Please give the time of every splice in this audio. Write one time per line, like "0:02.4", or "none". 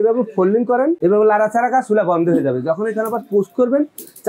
0:01.0